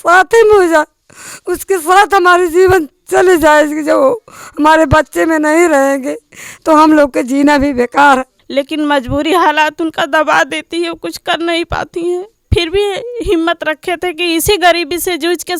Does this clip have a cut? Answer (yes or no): yes